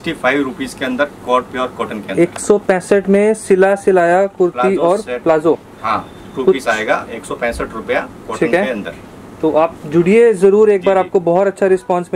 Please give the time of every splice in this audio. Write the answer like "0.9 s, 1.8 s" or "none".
none